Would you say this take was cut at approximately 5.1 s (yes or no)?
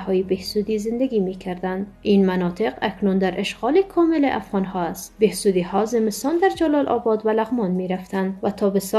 yes